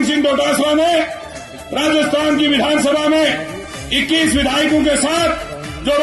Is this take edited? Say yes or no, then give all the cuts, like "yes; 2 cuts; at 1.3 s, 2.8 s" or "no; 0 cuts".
no; 0 cuts